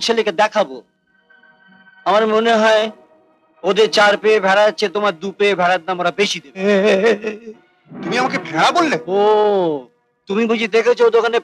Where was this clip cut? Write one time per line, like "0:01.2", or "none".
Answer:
none